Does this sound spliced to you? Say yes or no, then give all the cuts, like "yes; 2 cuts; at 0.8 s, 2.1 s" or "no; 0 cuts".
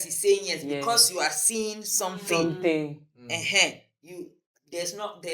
no; 0 cuts